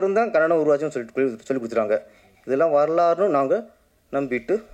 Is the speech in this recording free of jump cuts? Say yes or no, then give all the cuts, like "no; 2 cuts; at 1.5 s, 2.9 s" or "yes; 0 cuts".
yes; 0 cuts